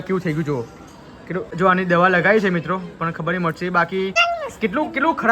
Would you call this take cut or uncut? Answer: cut